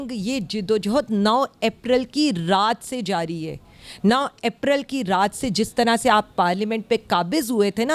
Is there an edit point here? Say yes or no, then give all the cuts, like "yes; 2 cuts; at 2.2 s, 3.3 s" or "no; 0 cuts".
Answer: no; 0 cuts